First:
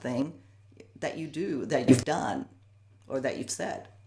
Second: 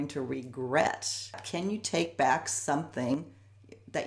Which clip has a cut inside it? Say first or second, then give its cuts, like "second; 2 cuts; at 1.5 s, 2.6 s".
second; 1 cut; at 1.4 s